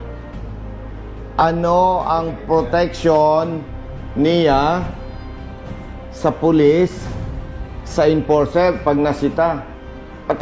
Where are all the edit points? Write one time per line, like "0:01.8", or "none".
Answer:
none

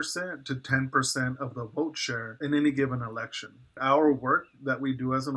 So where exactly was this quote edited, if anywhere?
0:02.3
0:03.8

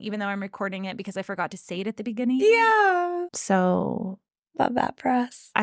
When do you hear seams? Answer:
0:03.3

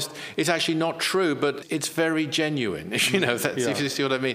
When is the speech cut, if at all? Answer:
0:01.6

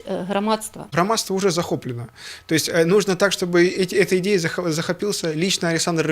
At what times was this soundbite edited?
0:00.9

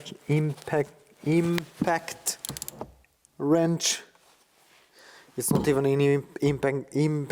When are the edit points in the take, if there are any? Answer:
none

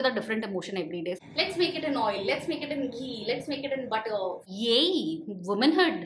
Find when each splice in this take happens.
0:01.2
0:04.4

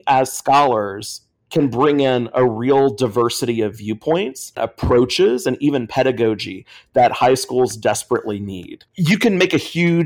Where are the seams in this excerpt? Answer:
0:04.6
0:08.9

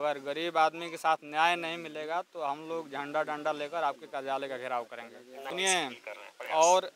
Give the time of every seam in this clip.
0:05.5

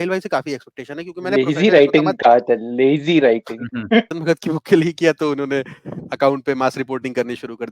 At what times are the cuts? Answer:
0:04.1

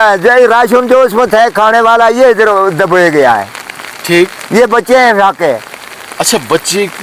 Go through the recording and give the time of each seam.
none

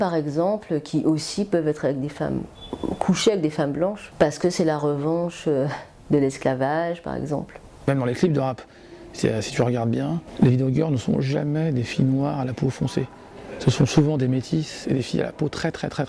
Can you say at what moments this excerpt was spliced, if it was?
0:04.0
0:07.5
0:10.2

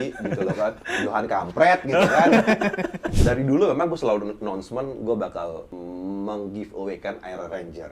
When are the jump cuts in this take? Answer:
0:03.1

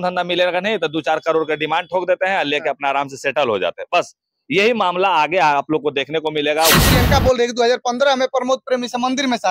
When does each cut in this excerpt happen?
0:06.7

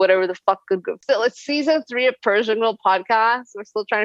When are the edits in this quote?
0:01.0

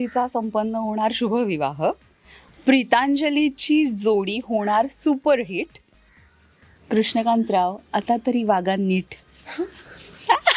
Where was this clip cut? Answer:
none

